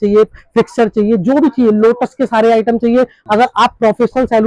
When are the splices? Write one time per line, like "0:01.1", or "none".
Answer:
0:03.2